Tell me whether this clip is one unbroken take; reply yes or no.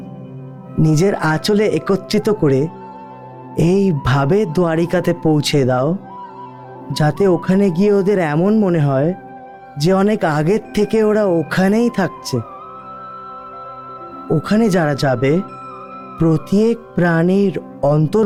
yes